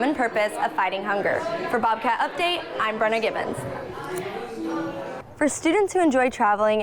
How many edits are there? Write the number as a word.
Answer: one